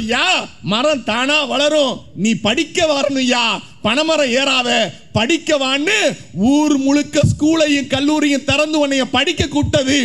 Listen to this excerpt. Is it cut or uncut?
uncut